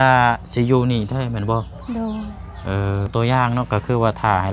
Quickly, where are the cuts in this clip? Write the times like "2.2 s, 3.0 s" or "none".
3.1 s